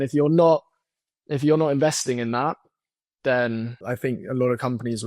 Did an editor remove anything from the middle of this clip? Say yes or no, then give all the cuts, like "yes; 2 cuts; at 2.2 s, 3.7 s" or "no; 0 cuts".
yes; 1 cut; at 3.8 s